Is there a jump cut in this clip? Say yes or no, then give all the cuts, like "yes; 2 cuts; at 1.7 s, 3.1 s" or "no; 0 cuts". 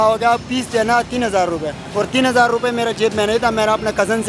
yes; 1 cut; at 1.8 s